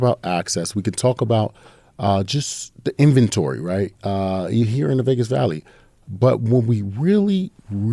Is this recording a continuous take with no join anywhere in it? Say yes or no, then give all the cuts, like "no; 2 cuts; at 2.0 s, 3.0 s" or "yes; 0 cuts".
yes; 0 cuts